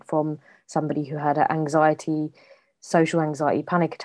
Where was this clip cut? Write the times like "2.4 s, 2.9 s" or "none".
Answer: none

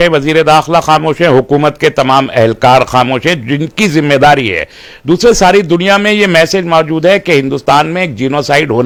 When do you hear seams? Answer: none

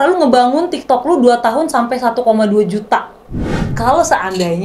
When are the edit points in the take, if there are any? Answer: 3.6 s

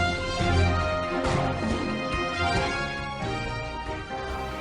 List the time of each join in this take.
none

